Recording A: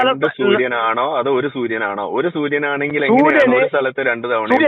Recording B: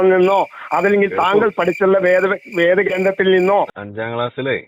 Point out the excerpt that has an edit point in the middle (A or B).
B